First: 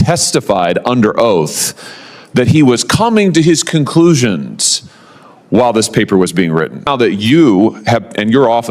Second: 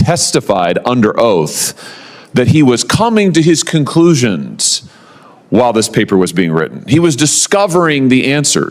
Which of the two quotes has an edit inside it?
first; 1 cut; at 6.9 s

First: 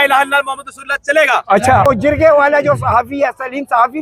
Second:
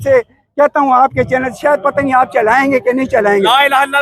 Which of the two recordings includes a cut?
first; 1 cut; at 1.9 s

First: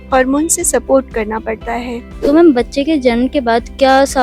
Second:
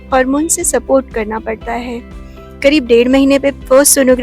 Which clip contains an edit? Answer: first; 1 cut; at 2.1 s

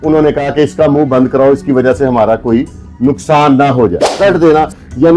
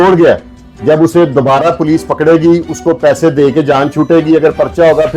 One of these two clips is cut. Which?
first; 1 cut; at 4.1 s

